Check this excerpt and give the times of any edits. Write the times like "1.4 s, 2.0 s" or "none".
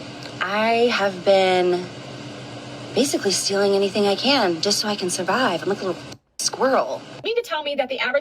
7.2 s